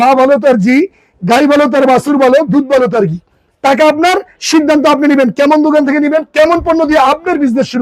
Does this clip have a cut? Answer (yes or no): no